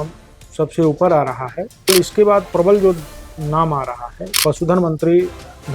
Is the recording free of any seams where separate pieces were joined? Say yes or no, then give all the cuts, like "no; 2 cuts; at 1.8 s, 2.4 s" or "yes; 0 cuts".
no; 2 cuts; at 1.9 s, 4.4 s